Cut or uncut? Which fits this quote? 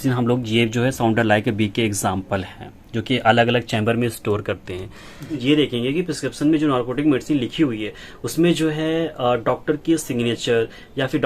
cut